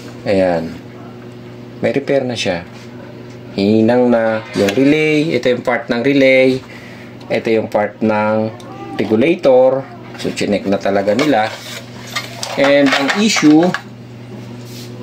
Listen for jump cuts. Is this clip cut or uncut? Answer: uncut